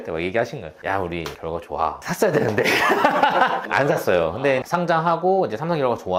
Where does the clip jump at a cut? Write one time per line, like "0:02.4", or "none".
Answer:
none